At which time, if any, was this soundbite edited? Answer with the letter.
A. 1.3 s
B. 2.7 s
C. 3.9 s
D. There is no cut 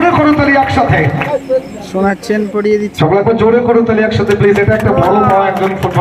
A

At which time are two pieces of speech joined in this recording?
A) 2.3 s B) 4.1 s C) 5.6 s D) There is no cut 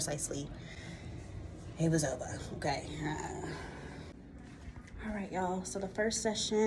B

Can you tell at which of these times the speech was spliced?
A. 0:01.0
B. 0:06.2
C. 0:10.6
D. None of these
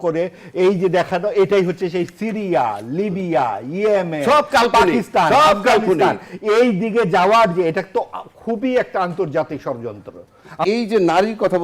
C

